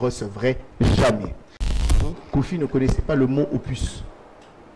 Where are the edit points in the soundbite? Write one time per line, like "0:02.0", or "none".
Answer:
0:02.2